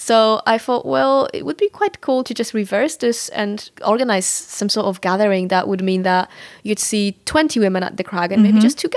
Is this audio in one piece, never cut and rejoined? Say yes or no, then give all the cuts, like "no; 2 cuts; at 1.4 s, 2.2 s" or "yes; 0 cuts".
yes; 0 cuts